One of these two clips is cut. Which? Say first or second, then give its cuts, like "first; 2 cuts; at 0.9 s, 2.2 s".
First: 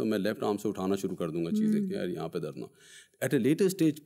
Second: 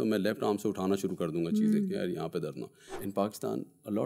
second; 1 cut; at 3.0 s